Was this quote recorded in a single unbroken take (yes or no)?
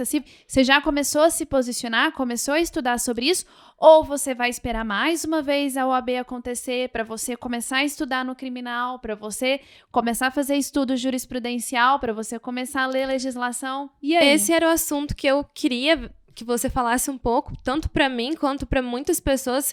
yes